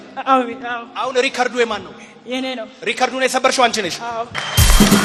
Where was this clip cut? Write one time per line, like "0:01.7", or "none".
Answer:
none